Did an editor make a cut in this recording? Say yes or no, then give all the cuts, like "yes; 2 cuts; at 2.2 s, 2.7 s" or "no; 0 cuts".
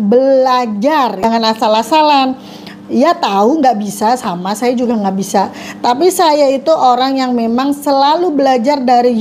yes; 1 cut; at 1.5 s